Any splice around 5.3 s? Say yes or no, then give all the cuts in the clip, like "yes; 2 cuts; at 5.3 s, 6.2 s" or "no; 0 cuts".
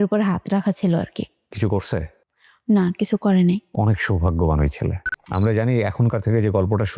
yes; 2 cuts; at 1.5 s, 5.3 s